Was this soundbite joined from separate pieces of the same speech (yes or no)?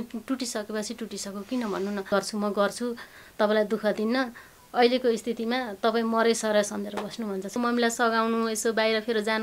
yes